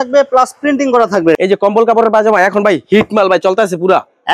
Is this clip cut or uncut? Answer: cut